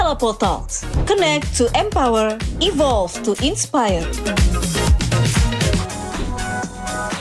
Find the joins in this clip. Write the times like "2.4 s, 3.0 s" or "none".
5.9 s